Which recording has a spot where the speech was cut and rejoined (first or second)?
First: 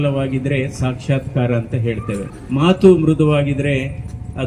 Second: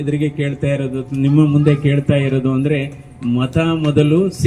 first